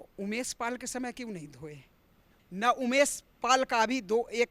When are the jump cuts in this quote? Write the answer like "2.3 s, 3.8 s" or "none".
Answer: 2.3 s